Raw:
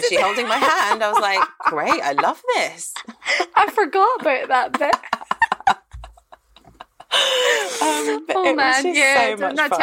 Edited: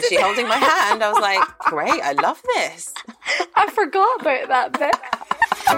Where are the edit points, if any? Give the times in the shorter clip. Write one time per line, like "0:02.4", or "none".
none

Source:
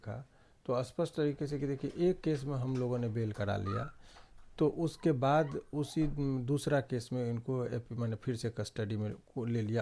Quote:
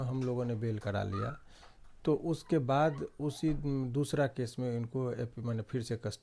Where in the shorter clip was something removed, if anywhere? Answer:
none

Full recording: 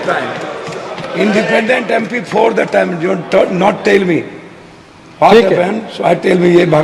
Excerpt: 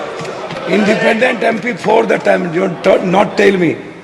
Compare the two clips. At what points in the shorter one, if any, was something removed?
none

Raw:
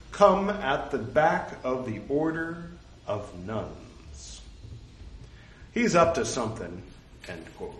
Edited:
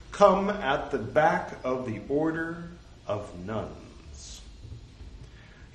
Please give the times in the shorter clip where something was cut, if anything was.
none

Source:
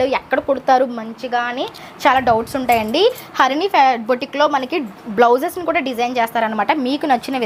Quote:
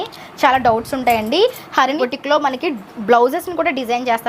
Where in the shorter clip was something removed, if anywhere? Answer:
0:02.0

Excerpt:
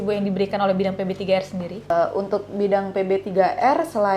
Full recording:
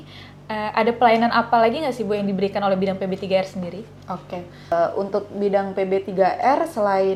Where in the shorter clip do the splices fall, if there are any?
0:01.7

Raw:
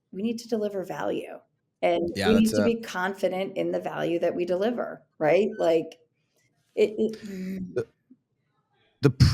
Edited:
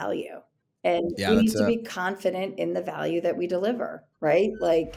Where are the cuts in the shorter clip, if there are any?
none

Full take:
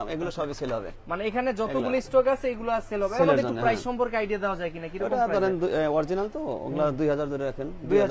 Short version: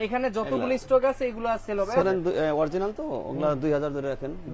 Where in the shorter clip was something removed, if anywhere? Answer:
0:02.0

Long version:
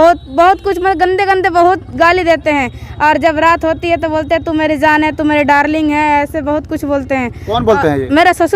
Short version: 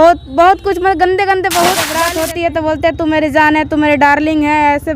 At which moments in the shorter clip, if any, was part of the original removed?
0:01.9

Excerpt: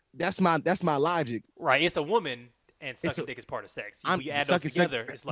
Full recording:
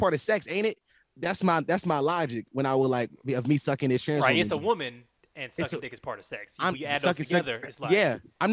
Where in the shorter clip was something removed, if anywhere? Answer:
0:01.5

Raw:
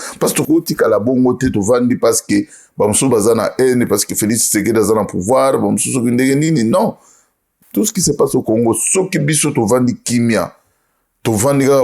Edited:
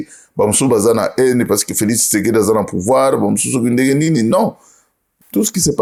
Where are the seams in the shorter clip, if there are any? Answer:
none

